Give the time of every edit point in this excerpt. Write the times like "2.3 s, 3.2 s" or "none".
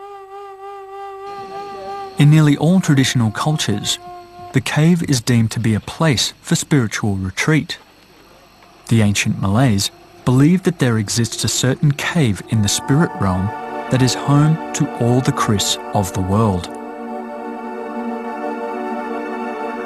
17.1 s